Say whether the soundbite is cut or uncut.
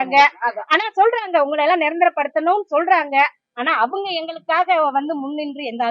uncut